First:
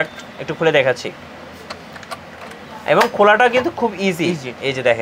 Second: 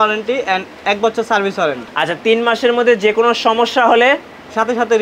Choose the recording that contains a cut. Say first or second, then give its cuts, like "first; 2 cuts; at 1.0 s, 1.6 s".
second; 1 cut; at 1.9 s